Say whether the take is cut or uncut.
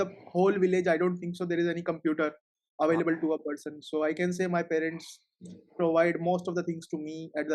uncut